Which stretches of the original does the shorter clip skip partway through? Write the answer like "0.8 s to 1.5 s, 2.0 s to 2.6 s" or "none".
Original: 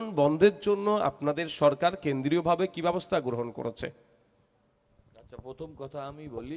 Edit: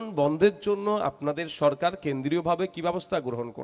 none

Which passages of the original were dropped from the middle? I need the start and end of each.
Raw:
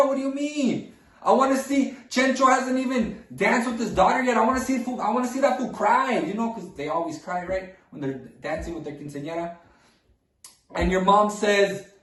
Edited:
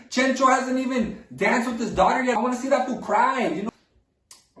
4.3 s to 5.1 s, 6.4 s to 9.8 s

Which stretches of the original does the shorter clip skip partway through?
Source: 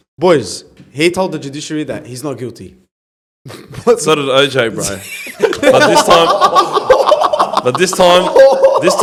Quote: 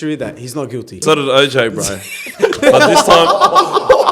2.7 s to 4.0 s

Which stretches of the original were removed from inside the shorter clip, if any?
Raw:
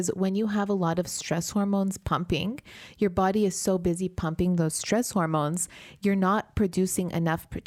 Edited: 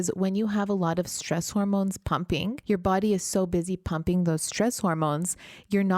2.6 s to 2.9 s

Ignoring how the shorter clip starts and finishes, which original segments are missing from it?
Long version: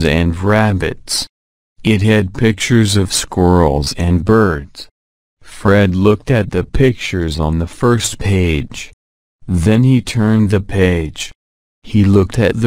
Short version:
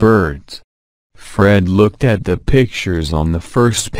none

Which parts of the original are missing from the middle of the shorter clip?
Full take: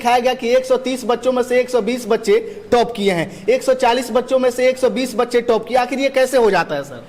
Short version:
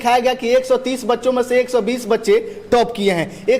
none

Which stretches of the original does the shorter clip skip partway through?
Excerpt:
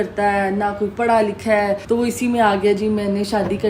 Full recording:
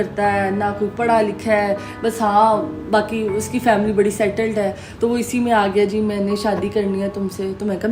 1.8 s to 4.9 s

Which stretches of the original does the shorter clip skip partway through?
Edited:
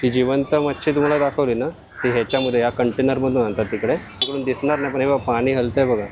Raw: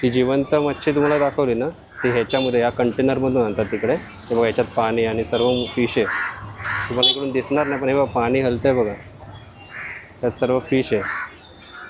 4.2 s to 7.1 s

